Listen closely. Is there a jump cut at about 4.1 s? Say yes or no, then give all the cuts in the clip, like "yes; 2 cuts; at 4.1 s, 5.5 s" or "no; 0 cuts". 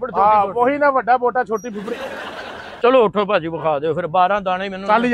no; 1 cut; at 2.7 s